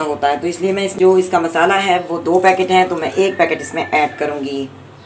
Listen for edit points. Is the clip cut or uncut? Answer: cut